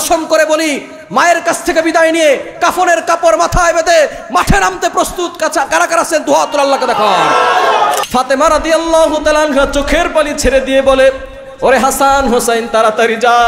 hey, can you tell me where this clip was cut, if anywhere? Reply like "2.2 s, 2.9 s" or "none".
8.0 s